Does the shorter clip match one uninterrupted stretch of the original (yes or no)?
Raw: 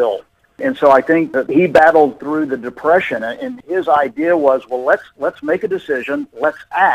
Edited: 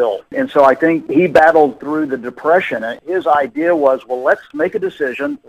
no